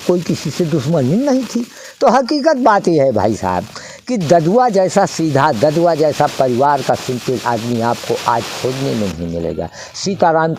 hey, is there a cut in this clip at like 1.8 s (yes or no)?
no